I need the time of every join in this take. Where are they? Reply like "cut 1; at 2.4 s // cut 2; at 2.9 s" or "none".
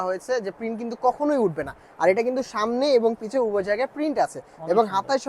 none